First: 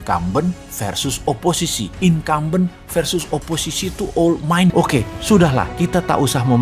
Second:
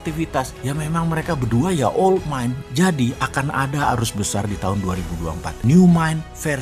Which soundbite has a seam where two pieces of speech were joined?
first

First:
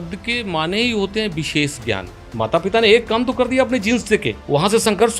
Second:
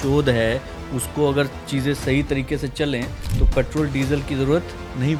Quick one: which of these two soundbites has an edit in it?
first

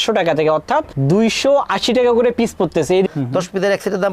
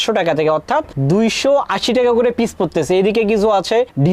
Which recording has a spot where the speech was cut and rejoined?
first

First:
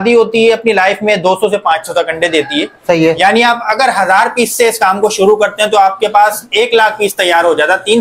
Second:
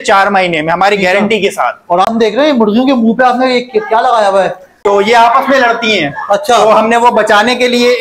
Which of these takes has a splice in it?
second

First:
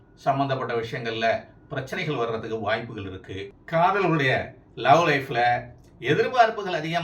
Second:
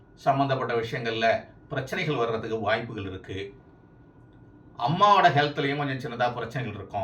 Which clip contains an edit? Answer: first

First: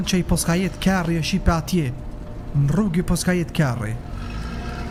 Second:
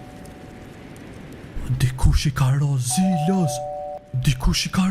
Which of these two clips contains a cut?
second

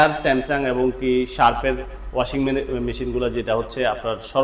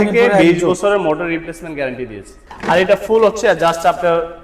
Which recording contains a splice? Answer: second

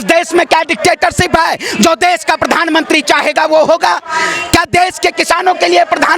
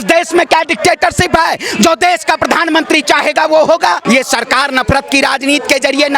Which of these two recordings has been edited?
second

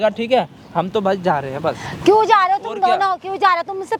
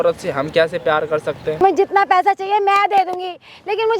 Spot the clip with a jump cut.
second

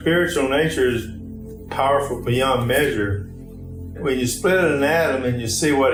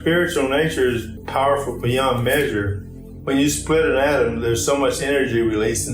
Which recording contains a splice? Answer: second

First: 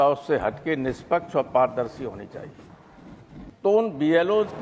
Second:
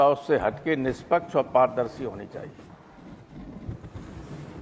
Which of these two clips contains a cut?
first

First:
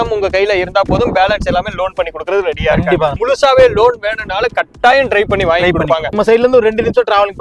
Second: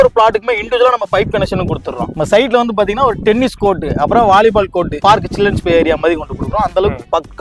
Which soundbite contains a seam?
first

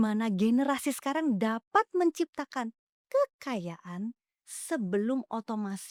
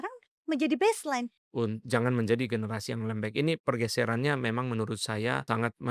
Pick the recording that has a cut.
second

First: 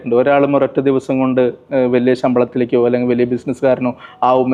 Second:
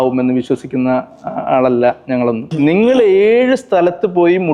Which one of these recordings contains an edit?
second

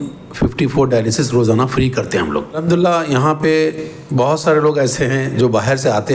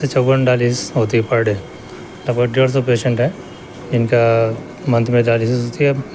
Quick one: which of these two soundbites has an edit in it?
first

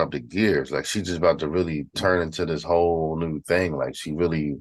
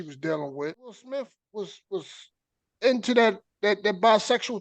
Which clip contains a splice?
second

